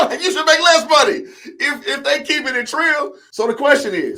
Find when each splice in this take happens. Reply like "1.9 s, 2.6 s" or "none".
3.2 s